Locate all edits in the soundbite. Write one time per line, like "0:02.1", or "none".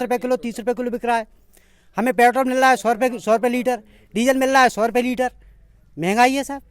none